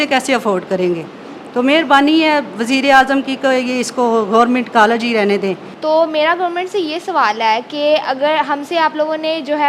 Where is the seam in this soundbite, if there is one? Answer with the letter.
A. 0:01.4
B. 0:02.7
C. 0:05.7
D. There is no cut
C